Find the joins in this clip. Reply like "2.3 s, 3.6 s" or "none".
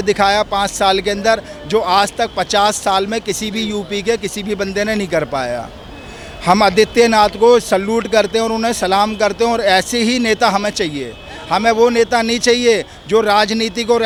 none